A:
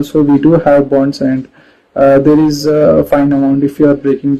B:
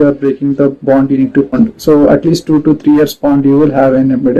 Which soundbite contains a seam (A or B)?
B